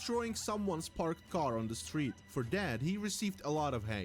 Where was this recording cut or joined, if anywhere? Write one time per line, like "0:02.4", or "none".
0:01.1